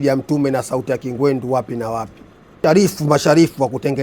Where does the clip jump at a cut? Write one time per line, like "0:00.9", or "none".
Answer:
0:02.6